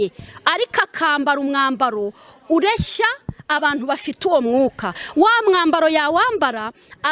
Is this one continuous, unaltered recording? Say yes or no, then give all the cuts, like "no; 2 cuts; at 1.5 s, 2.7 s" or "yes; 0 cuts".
yes; 0 cuts